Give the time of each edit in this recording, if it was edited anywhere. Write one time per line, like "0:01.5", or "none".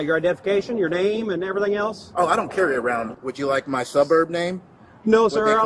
0:03.1